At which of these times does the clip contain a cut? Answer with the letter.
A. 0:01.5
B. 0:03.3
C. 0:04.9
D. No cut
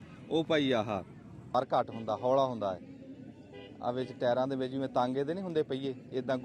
A